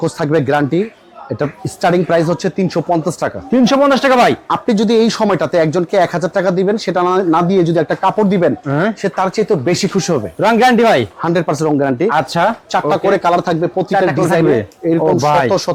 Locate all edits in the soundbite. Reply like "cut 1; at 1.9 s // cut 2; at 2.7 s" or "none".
none